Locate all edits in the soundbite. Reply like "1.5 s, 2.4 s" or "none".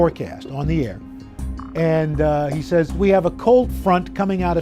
3.0 s